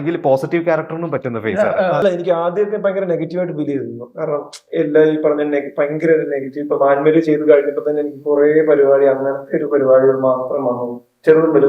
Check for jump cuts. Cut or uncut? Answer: cut